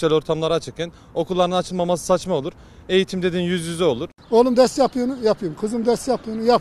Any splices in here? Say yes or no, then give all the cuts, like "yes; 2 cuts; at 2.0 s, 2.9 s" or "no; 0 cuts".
yes; 1 cut; at 4.2 s